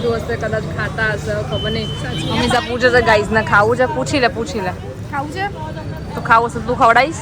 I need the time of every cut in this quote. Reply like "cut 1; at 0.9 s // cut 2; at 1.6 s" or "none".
none